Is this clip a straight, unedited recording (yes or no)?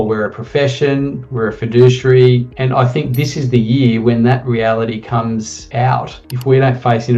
no